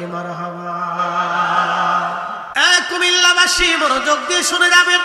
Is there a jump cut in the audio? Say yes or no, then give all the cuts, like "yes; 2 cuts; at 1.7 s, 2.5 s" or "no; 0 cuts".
yes; 1 cut; at 2.4 s